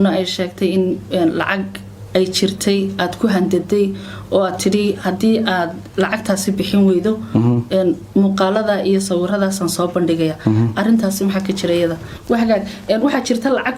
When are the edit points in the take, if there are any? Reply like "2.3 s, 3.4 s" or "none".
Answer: 12.1 s